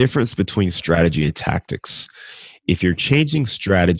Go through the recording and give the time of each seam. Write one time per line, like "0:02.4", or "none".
0:02.6